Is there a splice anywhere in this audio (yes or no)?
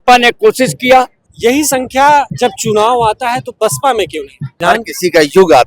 yes